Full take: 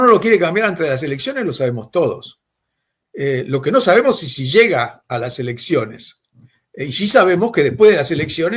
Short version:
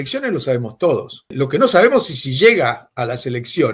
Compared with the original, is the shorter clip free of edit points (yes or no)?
no